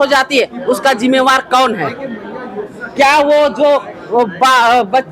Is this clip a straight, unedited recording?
yes; 0 cuts

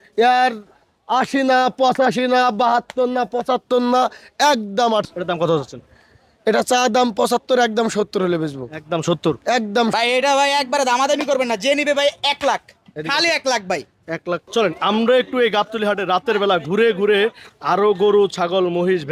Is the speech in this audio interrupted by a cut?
yes; 3 cuts; at 5.0 s, 9.9 s, 14.4 s

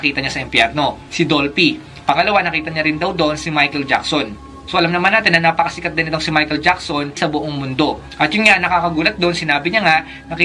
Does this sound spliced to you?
yes; 1 cut; at 8.1 s

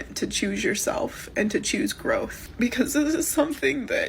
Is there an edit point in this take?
yes; 1 cut; at 2.4 s

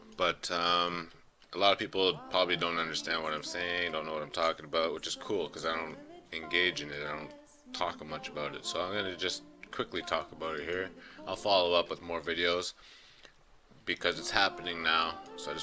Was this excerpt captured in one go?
no; 1 cut; at 4.3 s

